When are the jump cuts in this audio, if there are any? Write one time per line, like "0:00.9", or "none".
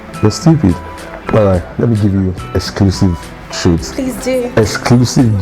0:00.9

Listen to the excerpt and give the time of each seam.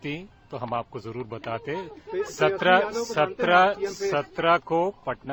none

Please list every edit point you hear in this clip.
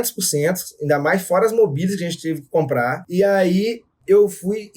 0:03.0
0:03.9

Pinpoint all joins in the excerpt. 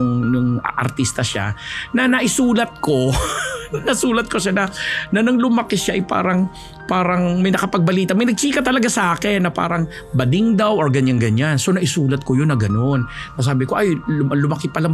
none

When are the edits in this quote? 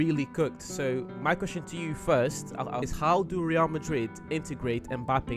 0:02.9

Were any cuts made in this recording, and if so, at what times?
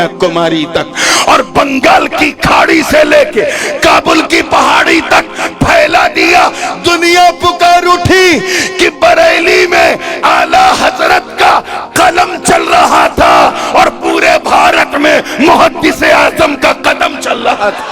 none

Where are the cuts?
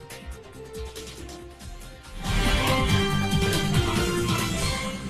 0:02.8

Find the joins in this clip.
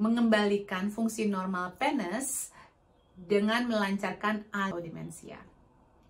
0:04.7

